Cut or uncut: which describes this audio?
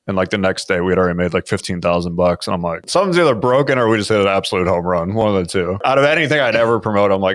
cut